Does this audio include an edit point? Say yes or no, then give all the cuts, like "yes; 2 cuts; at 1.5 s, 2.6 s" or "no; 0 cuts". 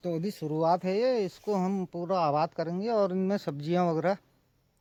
no; 0 cuts